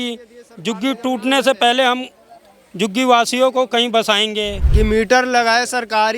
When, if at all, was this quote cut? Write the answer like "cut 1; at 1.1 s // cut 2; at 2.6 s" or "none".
cut 1; at 4.6 s